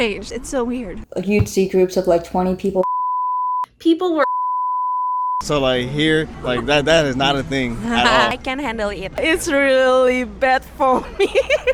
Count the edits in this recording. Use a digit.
0